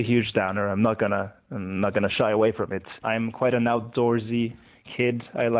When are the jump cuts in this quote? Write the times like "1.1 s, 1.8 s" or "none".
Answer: none